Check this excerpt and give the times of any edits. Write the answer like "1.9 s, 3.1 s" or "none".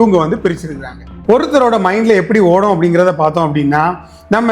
1.1 s